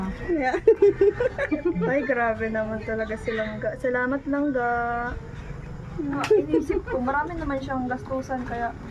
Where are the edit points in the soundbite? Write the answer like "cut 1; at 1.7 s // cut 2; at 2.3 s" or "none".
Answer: cut 1; at 6.2 s